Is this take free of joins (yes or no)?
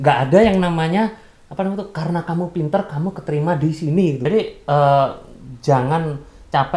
no